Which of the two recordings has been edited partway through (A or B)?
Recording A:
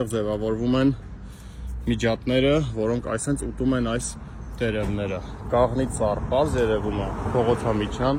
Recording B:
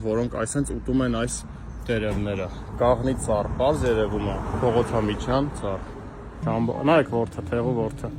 B